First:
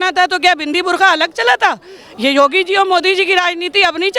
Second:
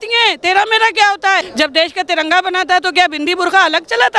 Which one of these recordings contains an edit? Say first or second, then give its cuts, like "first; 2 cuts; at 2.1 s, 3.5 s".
second; 1 cut; at 1.5 s